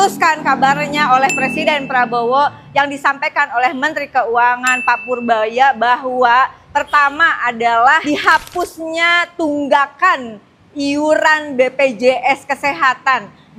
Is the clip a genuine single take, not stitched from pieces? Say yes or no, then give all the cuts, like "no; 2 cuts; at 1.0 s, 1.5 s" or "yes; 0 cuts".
yes; 0 cuts